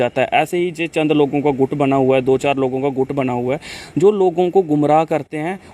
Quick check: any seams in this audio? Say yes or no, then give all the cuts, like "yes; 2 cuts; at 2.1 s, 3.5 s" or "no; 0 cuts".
no; 0 cuts